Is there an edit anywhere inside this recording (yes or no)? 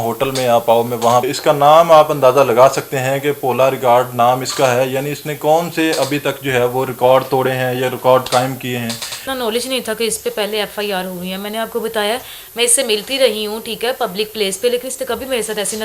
yes